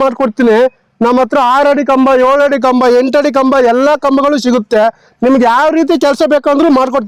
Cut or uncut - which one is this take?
uncut